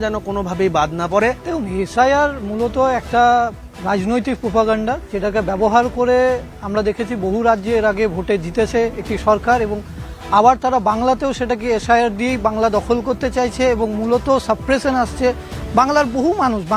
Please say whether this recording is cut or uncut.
uncut